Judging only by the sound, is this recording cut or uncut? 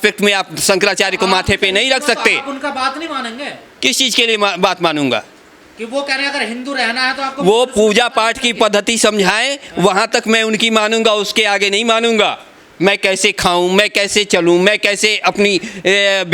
uncut